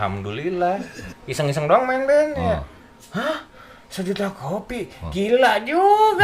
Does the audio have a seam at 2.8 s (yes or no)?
no